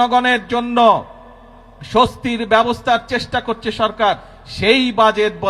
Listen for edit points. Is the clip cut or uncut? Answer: uncut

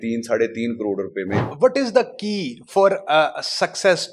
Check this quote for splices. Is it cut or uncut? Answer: cut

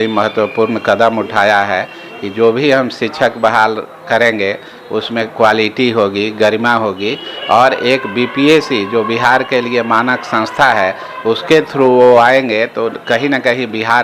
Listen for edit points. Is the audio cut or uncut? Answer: uncut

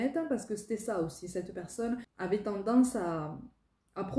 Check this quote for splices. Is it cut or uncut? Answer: cut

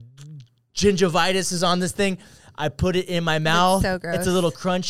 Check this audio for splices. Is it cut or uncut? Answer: uncut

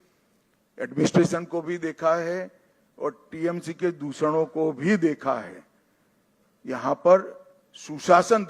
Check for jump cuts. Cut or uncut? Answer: uncut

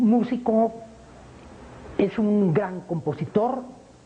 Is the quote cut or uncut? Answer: cut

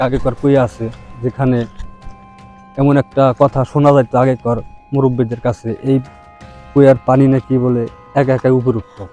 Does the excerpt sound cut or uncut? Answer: uncut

